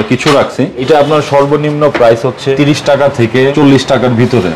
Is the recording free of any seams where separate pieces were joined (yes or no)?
no